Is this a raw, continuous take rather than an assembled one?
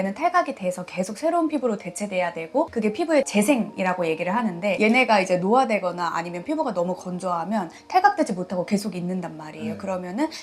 no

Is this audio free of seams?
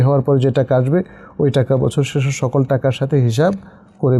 yes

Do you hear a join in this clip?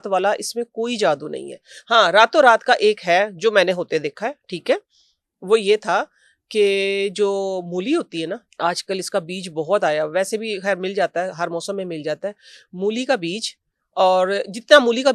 no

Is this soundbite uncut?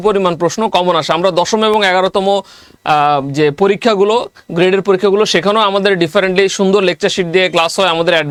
yes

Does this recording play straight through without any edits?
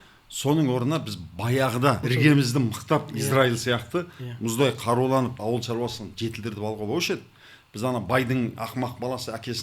no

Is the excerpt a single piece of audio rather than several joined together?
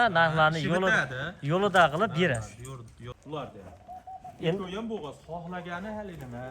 no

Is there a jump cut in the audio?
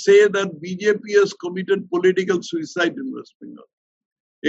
no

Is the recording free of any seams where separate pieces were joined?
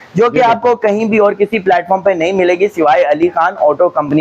yes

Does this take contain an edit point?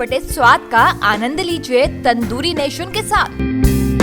no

